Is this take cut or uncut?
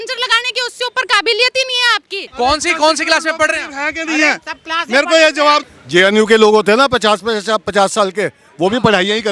cut